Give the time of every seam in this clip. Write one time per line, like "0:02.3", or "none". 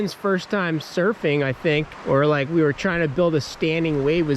0:01.9

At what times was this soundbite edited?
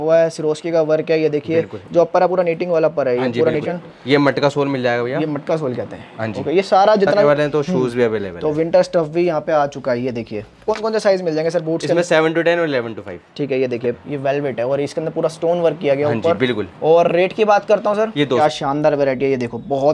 0:03.6
0:07.2
0:10.6
0:14.1
0:18.4

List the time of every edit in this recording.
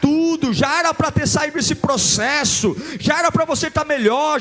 none

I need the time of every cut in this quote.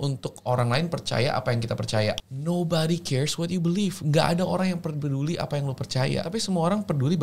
0:02.3
0:06.3

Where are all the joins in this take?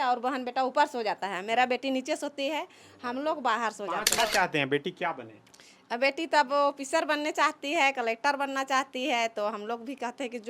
0:04.2

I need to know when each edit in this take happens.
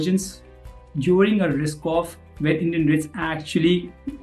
none

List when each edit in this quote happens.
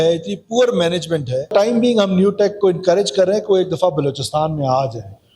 0:01.5

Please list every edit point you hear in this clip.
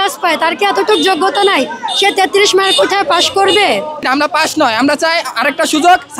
0:04.0

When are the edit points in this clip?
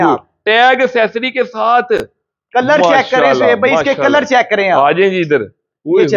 none

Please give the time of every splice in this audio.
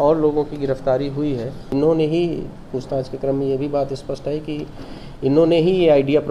0:01.7

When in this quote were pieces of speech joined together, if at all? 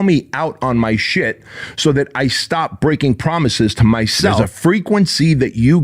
0:04.4

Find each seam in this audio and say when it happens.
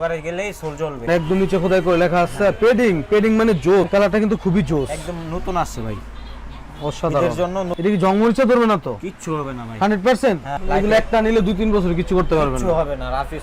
0:01.0
0:03.8
0:07.7
0:10.5

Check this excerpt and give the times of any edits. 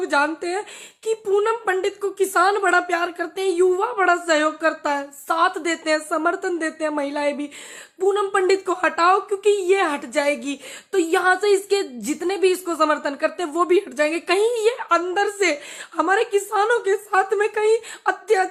none

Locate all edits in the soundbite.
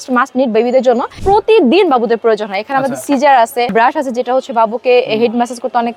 0:01.1
0:03.7

